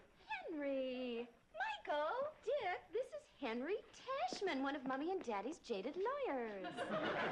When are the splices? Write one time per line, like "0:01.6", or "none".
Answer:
none